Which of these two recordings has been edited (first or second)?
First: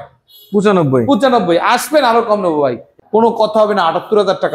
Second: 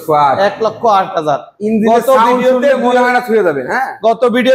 first